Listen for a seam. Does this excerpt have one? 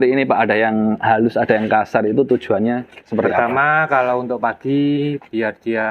no; 0 cuts

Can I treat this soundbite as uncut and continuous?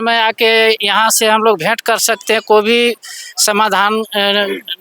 yes; 0 cuts

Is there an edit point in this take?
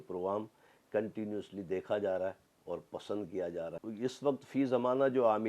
yes; 1 cut; at 3.8 s

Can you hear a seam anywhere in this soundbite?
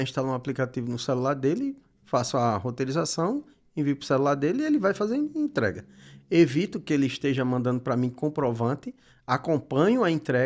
no; 0 cuts

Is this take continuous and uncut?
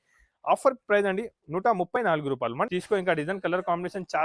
no; 1 cut; at 2.7 s

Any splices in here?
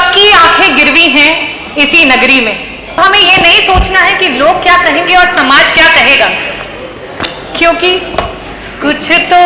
yes; 1 cut; at 3.0 s

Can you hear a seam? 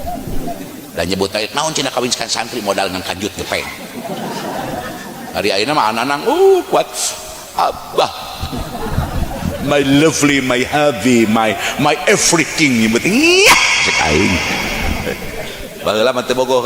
no; 0 cuts

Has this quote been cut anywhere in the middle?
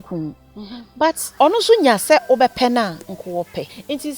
yes; 2 cuts; at 1.3 s, 3.4 s

